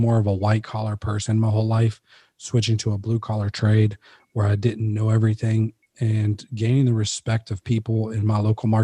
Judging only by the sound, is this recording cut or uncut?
uncut